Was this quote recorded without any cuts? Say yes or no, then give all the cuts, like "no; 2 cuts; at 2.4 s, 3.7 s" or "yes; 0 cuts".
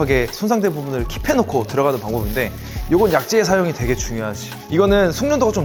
yes; 0 cuts